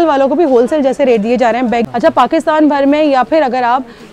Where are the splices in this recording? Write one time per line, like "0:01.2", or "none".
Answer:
0:01.8